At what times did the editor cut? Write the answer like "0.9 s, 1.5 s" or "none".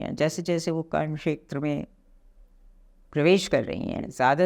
none